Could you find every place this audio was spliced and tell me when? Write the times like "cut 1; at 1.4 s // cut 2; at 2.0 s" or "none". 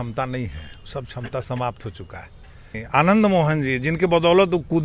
cut 1; at 2.7 s